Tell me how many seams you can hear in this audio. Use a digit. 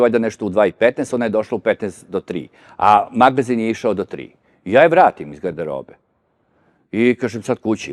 0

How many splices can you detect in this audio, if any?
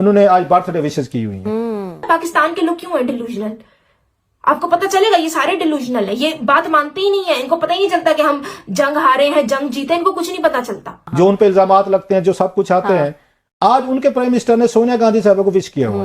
2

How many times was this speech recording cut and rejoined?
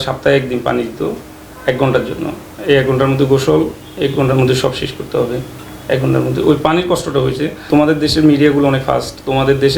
0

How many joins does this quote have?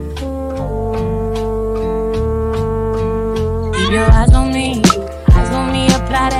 0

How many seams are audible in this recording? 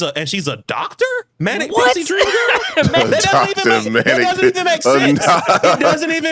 1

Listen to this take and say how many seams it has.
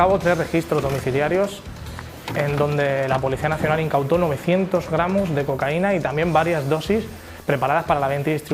0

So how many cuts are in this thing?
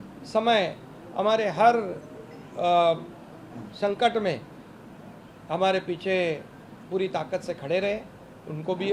0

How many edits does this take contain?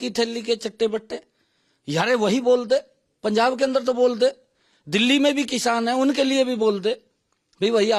0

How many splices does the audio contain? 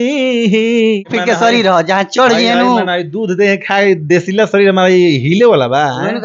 1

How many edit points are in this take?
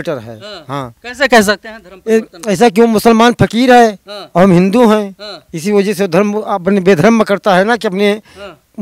0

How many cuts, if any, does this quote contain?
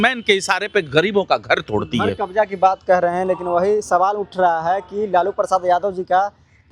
0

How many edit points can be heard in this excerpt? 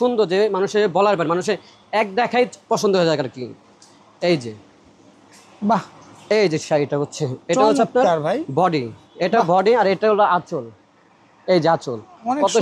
0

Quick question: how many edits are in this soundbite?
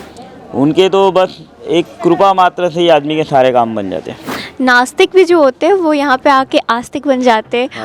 1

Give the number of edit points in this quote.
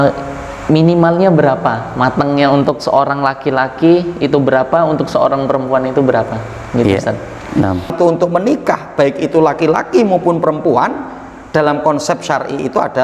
1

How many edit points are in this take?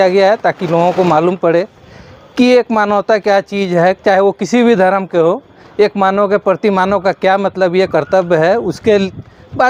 0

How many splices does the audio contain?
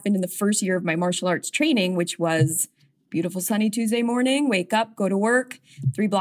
0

